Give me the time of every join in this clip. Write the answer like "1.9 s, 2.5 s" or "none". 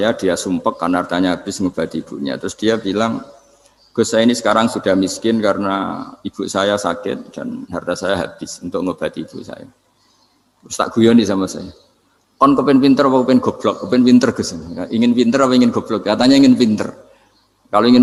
none